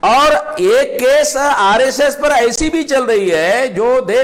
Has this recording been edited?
no; 0 cuts

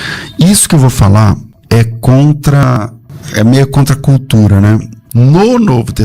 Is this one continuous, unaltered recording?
no; 3 cuts; at 1.5 s, 2.6 s, 5.0 s

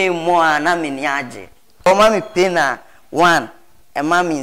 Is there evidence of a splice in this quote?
yes; 1 cut; at 1.9 s

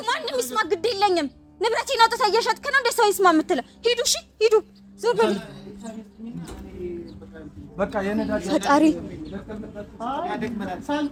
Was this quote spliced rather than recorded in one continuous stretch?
no; 0 cuts

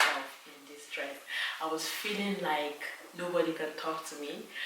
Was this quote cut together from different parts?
no; 0 cuts

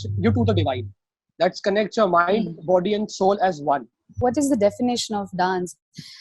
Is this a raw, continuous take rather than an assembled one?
no; 1 cut; at 4.2 s

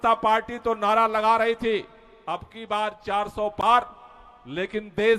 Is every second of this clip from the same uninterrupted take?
yes; 0 cuts

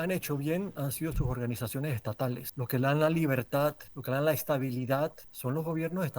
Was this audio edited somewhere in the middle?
yes; 3 cuts; at 2.5 s, 3.9 s, 5.3 s

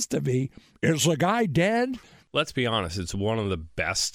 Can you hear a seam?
yes; 1 cut; at 2.1 s

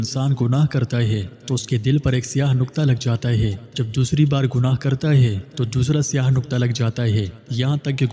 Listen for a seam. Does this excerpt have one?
yes; 1 cut; at 3.6 s

